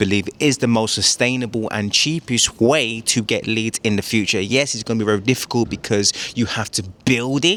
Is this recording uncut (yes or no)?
yes